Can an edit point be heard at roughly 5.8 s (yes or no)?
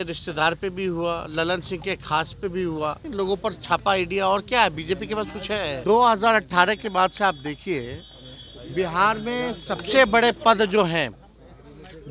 yes